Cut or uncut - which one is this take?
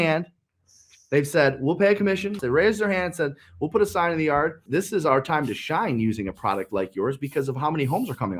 cut